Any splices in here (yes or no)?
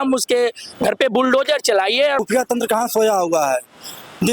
yes